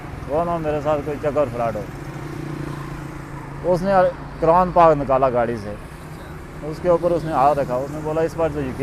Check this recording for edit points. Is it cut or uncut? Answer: uncut